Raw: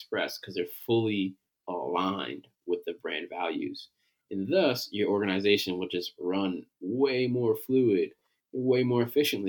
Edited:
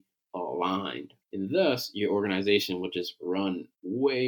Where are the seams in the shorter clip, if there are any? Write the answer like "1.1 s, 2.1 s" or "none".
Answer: 1.1 s